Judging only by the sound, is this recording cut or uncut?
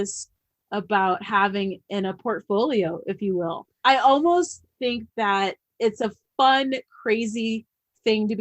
cut